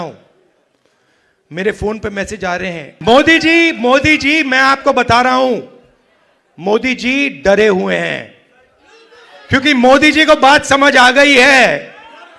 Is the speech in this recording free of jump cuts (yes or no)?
no